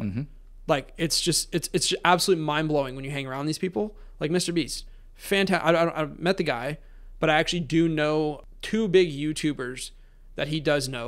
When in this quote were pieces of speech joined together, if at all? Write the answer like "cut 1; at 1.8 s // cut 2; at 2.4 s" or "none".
cut 1; at 8.4 s